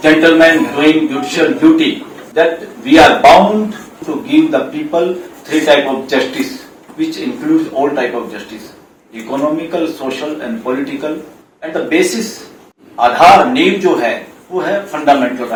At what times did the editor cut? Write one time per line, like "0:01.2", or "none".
none